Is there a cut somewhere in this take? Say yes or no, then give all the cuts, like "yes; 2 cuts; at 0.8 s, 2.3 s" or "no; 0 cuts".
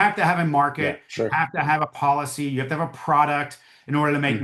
no; 0 cuts